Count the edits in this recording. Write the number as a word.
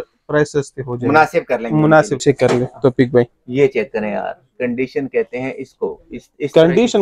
one